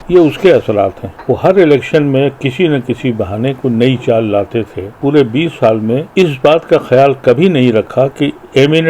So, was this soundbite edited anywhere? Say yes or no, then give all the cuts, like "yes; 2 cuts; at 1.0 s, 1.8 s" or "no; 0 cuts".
yes; 3 cuts; at 1.1 s, 4.9 s, 6.1 s